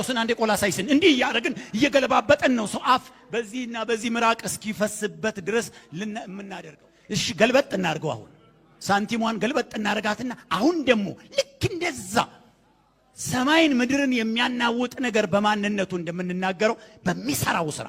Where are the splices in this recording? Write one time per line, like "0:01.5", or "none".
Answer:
0:06.4